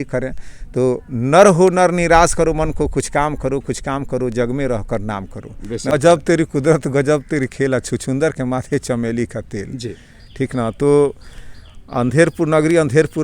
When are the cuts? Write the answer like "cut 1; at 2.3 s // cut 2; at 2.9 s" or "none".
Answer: cut 1; at 5.9 s